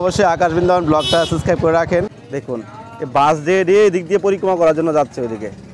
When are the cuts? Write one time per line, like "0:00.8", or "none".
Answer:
0:02.2